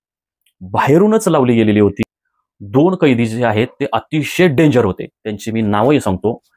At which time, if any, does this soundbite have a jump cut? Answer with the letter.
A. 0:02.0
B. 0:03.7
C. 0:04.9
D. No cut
A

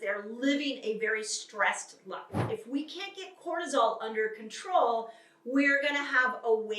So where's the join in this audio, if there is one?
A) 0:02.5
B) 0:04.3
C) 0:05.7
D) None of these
A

